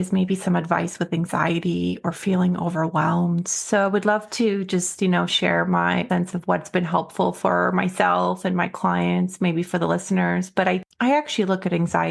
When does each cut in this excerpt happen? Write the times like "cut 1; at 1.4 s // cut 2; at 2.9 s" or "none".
cut 1; at 6.1 s // cut 2; at 10.8 s